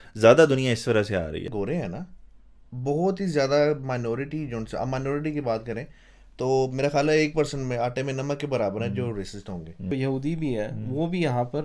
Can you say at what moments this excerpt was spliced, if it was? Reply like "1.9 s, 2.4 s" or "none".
1.5 s, 9.9 s